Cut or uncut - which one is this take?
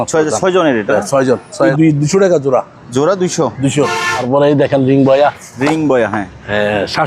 cut